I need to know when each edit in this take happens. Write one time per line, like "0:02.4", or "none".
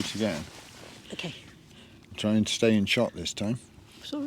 none